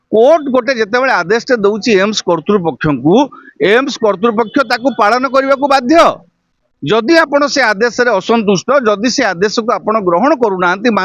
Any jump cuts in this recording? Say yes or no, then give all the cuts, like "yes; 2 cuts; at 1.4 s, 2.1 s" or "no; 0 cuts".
no; 0 cuts